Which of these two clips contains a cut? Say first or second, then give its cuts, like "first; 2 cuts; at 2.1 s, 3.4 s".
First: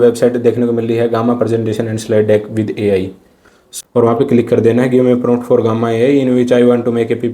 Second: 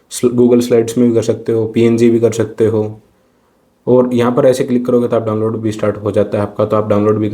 first; 1 cut; at 3.6 s